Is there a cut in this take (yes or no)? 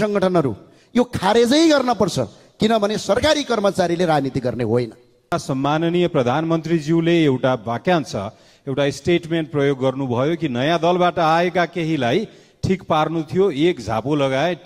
yes